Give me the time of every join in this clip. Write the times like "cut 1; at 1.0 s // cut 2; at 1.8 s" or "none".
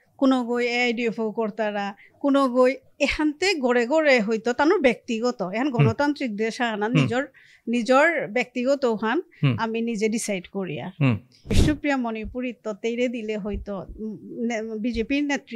cut 1; at 11.3 s